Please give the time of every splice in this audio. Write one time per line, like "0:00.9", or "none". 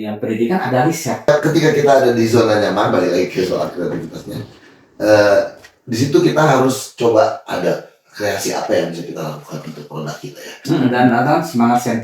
0:01.3
0:10.9